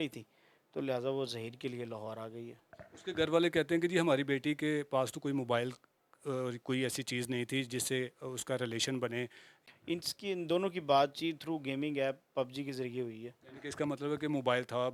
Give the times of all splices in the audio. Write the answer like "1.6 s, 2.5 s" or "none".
none